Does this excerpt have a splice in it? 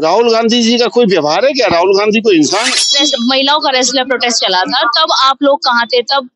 yes; 1 cut; at 2.8 s

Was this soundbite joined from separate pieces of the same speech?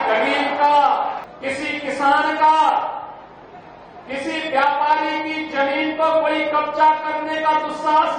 yes; 1 cut; at 1.3 s

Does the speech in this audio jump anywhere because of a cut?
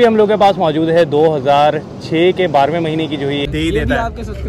yes; 1 cut; at 3.5 s

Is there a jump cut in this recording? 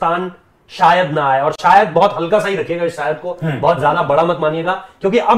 no; 0 cuts

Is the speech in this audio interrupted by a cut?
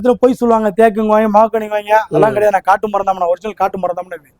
no; 0 cuts

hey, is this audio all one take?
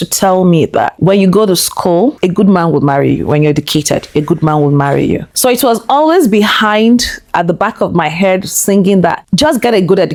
yes; 0 cuts

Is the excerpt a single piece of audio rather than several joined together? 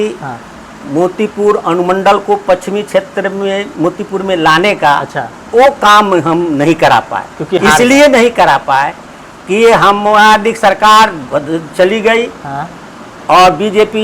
yes; 0 cuts

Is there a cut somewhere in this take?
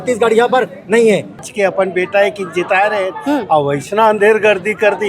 yes; 1 cut; at 1.4 s

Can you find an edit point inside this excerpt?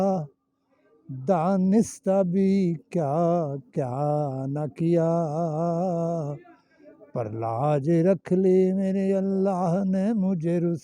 no; 0 cuts

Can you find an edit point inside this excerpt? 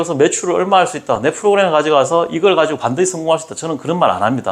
no; 0 cuts

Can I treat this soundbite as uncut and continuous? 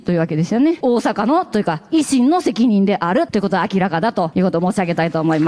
no; 3 cuts; at 0.8 s, 3.3 s, 4.3 s

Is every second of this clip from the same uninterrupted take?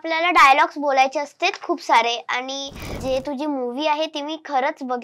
no; 1 cut; at 3.0 s

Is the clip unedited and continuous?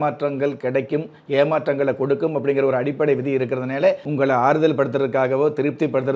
no; 1 cut; at 4.0 s

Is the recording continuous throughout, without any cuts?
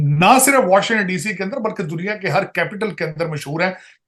yes; 0 cuts

